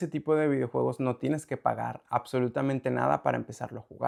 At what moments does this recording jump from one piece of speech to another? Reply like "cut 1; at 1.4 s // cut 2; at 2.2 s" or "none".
none